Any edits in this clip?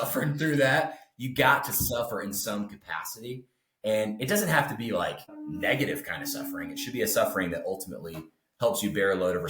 yes; 1 cut; at 5.3 s

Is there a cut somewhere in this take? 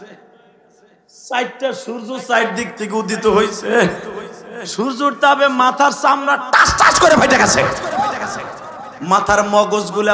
no; 0 cuts

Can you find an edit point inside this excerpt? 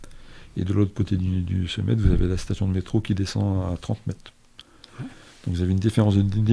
no; 0 cuts

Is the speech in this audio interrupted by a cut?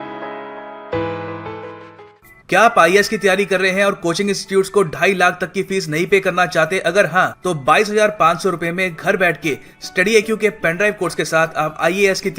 yes; 1 cut; at 1.8 s

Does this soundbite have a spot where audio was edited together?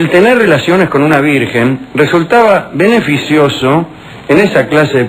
yes; 1 cut; at 1.6 s

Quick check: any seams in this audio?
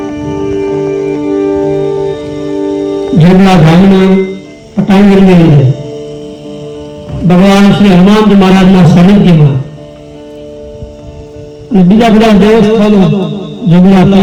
no; 0 cuts

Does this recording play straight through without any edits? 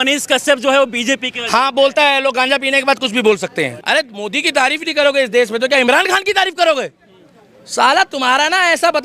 no; 1 cut; at 3.8 s

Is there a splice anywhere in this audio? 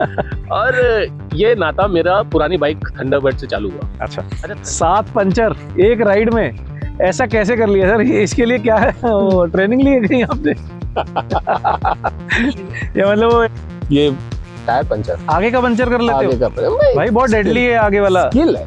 yes; 2 cuts; at 4.3 s, 13.5 s

